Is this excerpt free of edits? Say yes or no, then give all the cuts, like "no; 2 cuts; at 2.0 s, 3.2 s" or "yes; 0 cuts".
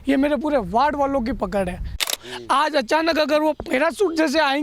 no; 1 cut; at 2.2 s